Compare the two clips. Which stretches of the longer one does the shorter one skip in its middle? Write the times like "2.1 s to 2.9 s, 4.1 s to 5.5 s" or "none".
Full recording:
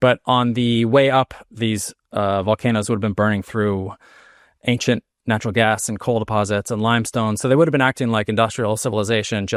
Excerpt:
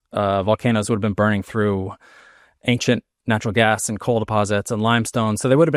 none